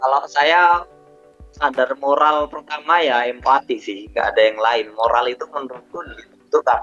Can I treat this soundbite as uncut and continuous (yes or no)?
yes